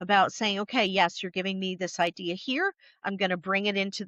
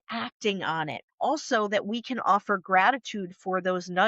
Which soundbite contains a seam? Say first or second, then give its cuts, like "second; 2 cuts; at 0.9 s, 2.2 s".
second; 1 cut; at 1.0 s